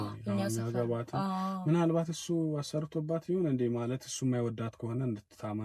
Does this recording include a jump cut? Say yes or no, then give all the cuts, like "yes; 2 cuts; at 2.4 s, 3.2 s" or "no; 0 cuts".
no; 0 cuts